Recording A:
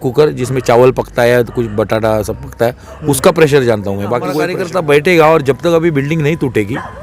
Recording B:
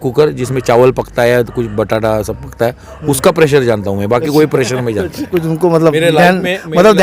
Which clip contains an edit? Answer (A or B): A